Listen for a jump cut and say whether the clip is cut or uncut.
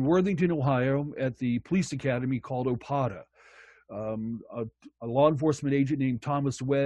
uncut